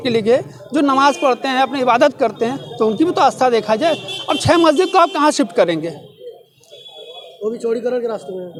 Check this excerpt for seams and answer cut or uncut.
uncut